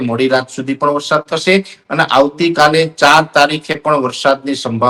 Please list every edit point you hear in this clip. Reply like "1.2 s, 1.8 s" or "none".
none